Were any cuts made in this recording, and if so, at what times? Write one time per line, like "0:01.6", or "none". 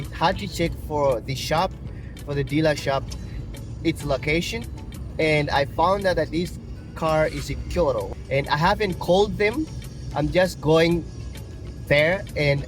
0:08.1